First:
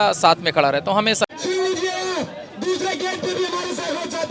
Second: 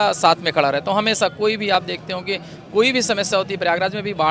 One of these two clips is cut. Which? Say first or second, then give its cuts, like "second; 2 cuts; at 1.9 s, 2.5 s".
first; 1 cut; at 1.2 s